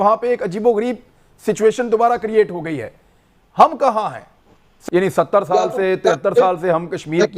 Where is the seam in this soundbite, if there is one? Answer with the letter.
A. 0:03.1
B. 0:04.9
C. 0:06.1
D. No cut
B